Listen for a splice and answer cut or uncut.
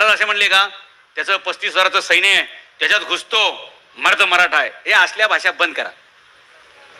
uncut